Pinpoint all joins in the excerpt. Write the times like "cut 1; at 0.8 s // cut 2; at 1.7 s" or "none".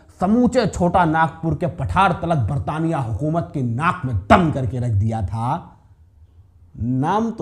none